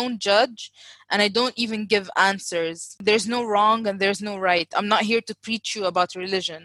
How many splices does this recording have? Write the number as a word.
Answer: one